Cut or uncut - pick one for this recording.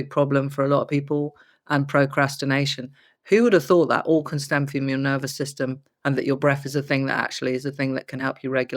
uncut